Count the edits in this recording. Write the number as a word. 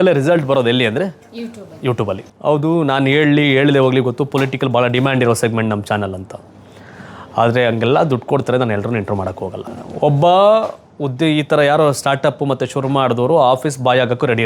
two